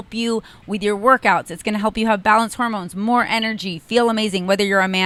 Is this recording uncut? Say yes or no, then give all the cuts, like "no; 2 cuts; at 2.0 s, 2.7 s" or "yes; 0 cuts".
yes; 0 cuts